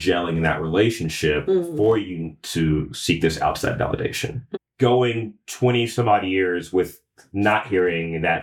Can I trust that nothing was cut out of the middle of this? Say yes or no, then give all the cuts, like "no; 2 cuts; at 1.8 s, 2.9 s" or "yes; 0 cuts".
yes; 0 cuts